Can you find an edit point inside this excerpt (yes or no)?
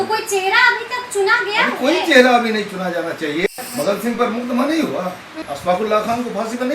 yes